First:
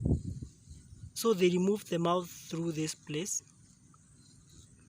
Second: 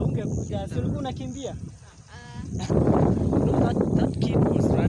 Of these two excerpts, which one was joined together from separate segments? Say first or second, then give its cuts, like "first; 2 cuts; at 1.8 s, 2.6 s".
second; 1 cut; at 2.7 s